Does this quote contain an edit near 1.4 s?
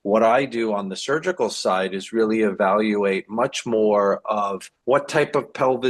no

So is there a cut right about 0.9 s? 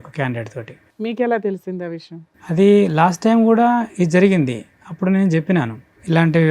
no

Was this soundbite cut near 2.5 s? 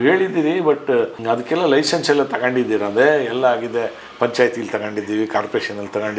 no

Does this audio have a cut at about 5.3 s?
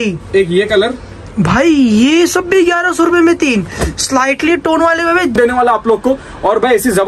yes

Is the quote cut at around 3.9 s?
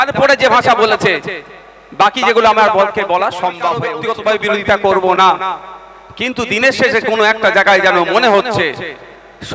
yes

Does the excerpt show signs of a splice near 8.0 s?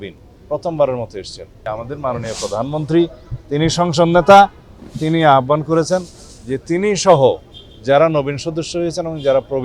no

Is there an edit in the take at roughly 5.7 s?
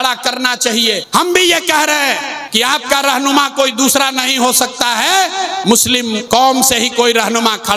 yes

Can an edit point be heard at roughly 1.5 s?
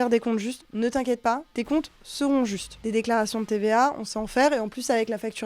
yes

